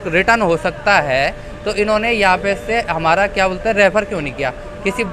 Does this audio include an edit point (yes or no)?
no